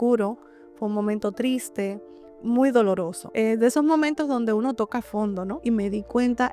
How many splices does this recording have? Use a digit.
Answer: 2